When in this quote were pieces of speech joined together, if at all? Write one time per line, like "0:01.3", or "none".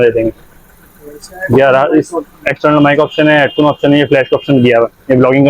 none